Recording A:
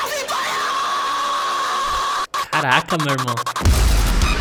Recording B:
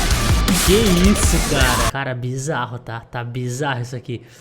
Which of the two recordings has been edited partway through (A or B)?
B